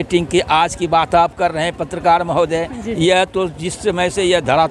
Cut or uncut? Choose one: uncut